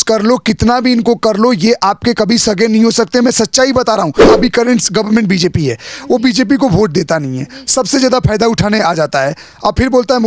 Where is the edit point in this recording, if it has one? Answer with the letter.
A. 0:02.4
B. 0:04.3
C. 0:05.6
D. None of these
B